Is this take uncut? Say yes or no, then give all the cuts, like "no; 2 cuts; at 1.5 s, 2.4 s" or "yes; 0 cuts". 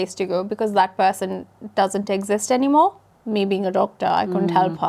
no; 1 cut; at 3.1 s